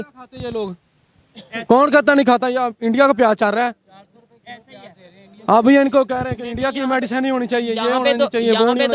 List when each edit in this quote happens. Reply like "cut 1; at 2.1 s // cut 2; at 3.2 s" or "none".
none